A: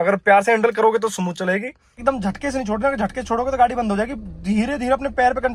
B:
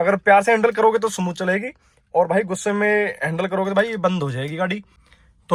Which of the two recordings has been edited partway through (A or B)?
A